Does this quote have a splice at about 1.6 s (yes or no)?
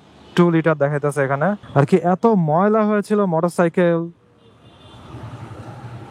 yes